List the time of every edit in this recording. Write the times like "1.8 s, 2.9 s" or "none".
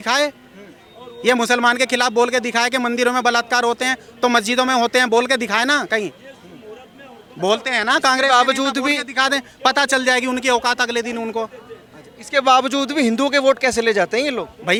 none